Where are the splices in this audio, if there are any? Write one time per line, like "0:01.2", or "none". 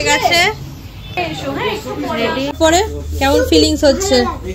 0:02.5